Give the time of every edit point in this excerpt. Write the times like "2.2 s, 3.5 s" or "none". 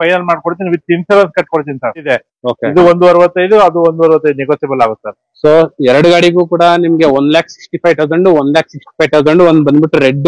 2.1 s